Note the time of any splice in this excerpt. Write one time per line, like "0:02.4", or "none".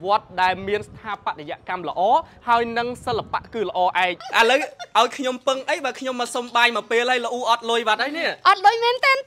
0:04.2